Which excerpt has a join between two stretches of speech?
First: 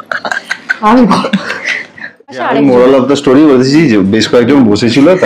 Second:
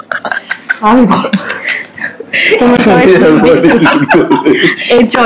first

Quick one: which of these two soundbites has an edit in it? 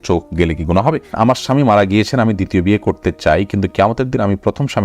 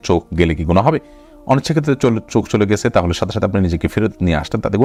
first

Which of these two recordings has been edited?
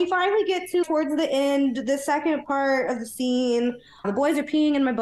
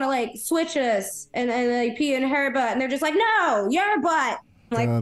first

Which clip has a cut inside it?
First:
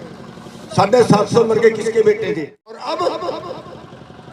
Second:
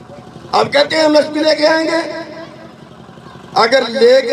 first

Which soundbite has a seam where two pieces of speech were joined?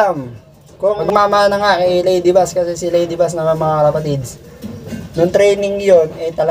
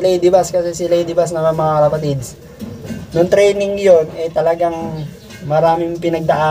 first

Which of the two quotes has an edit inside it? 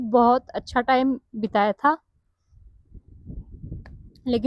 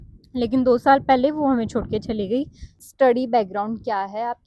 second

